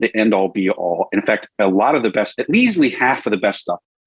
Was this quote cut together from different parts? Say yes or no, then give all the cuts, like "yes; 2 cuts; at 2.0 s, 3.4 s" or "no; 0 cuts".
no; 0 cuts